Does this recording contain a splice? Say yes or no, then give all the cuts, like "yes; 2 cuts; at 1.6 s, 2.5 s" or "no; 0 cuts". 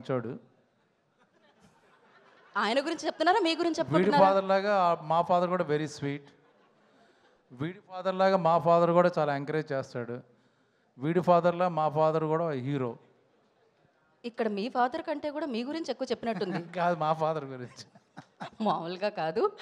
no; 0 cuts